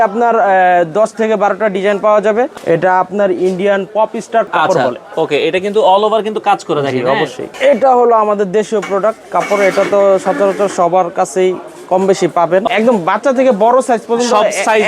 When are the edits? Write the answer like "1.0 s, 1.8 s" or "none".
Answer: 2.5 s, 4.5 s, 7.4 s, 12.7 s